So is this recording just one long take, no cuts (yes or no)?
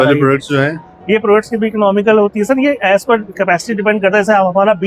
yes